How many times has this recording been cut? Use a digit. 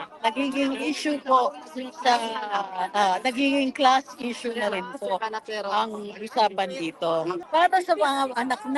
1